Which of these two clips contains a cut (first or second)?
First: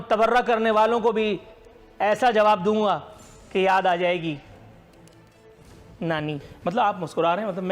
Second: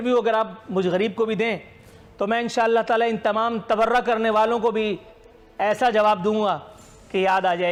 first